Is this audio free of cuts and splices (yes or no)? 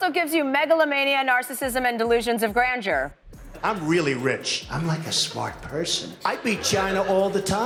yes